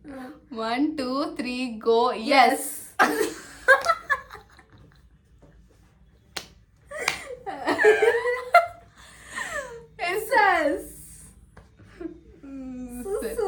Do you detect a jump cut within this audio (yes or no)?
no